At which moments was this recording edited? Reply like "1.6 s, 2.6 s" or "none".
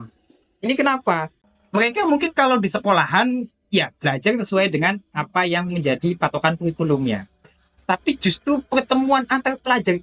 1.3 s